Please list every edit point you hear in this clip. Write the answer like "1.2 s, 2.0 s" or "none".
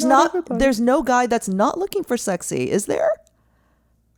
none